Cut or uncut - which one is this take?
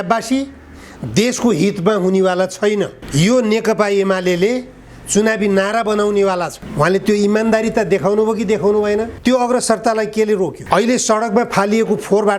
cut